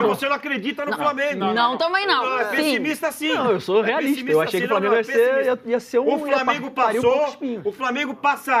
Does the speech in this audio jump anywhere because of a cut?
no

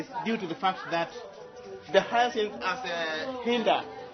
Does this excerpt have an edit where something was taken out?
no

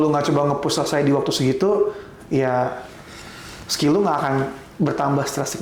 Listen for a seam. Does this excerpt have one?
no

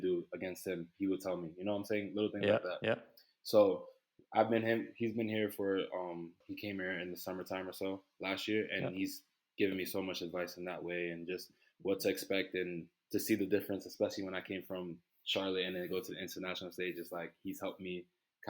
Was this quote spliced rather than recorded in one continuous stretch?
yes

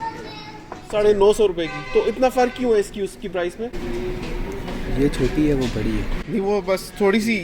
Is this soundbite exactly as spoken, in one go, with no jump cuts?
no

